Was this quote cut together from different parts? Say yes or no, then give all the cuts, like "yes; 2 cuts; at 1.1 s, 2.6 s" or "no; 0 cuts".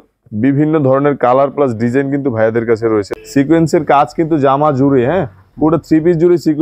yes; 1 cut; at 3.1 s